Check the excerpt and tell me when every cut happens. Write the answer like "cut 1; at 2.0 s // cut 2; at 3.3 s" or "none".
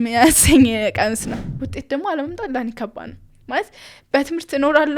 cut 1; at 1.4 s